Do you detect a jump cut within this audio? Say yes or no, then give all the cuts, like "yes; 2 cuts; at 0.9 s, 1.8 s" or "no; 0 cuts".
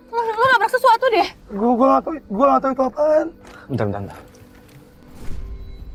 no; 0 cuts